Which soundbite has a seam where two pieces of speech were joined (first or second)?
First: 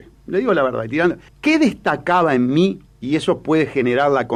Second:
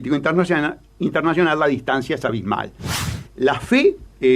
second